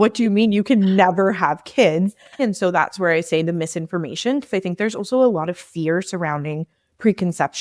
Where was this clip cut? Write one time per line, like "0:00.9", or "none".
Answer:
0:02.4